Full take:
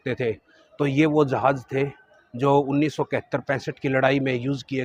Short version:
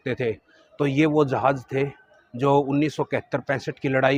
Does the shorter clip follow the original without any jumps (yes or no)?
yes